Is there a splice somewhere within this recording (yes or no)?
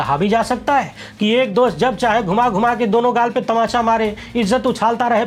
no